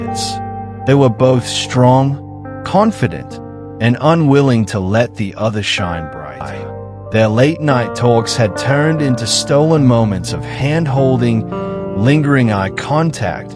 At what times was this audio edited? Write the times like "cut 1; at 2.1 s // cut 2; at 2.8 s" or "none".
cut 1; at 6.6 s